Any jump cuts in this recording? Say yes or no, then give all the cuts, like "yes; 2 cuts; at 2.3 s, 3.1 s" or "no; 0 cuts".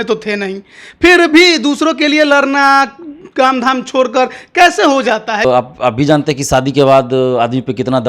yes; 1 cut; at 5.4 s